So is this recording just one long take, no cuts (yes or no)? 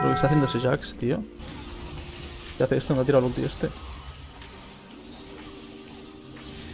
no